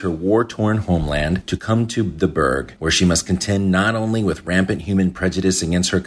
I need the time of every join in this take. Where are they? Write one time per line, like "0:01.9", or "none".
0:02.7